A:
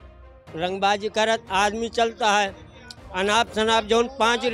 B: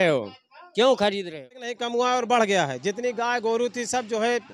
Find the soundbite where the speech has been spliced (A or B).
B